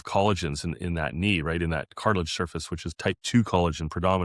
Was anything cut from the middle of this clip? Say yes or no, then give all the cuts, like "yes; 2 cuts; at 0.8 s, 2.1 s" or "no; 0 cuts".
no; 0 cuts